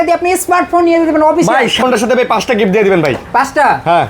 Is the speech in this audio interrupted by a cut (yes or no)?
yes